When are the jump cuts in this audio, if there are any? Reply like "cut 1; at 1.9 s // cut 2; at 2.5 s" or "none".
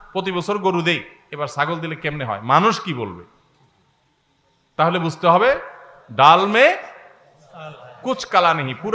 none